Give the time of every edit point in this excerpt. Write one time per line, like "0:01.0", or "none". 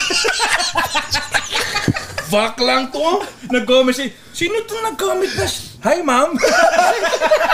0:05.6